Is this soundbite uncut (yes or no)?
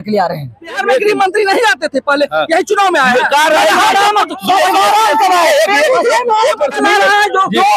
no